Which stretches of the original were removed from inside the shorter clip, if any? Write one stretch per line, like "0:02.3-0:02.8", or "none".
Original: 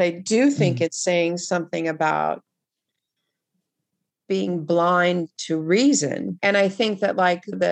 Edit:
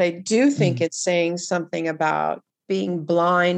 0:02.5-0:04.1